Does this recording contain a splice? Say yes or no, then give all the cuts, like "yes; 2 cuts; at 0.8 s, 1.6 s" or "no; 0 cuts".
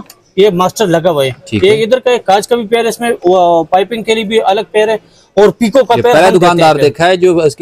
no; 0 cuts